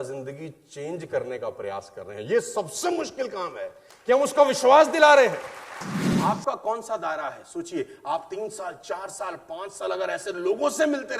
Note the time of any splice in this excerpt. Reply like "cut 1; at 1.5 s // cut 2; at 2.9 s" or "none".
cut 1; at 6.1 s